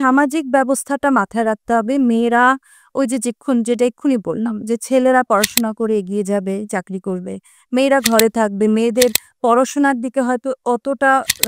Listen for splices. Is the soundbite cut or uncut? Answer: uncut